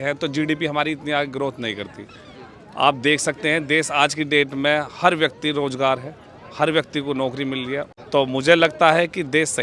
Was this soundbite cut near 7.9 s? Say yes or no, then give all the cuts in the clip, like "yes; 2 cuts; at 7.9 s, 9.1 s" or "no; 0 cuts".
yes; 1 cut; at 7.9 s